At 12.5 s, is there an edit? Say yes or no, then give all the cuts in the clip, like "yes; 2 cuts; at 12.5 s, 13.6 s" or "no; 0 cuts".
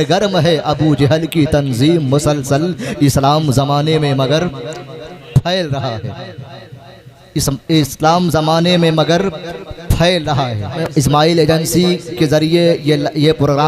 no; 1 cut; at 10.9 s